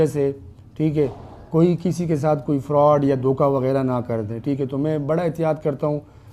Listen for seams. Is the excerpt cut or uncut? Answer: uncut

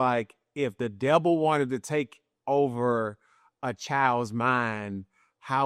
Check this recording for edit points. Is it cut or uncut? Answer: uncut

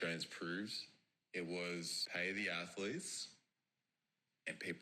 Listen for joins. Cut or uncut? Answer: cut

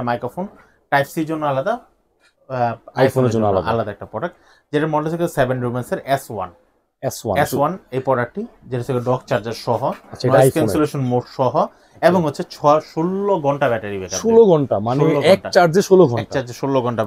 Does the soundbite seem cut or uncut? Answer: uncut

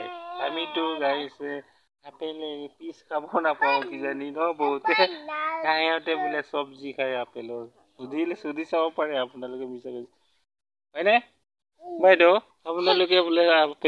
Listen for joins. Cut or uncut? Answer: uncut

